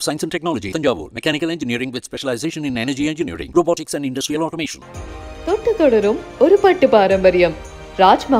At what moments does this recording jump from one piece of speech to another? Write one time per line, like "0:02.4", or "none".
none